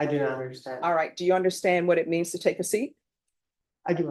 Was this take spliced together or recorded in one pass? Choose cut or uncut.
uncut